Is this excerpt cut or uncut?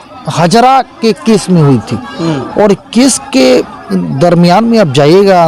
uncut